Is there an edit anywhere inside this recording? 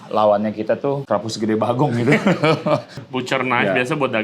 yes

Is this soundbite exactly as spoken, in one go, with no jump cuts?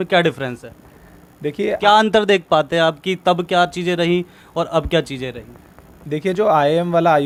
yes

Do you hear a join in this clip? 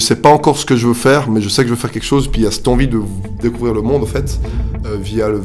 no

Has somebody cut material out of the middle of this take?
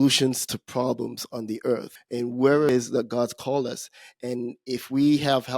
yes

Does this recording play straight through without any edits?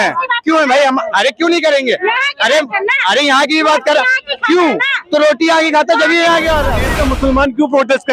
no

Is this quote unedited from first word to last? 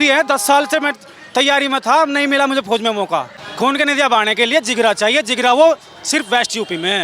no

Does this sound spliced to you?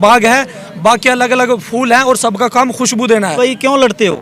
yes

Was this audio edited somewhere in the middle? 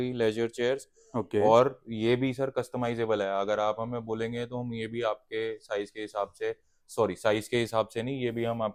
no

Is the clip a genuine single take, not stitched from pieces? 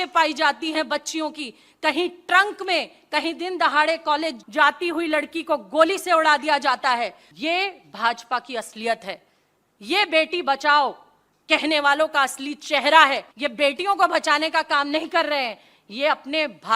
no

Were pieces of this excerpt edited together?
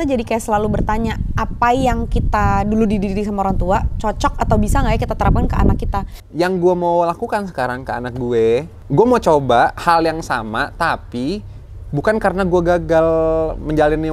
yes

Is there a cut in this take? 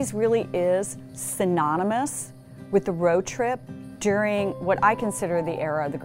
no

